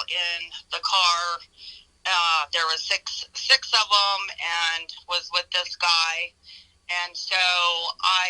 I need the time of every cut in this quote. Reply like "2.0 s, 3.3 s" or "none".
none